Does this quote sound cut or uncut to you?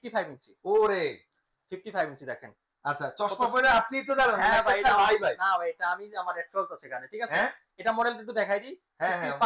uncut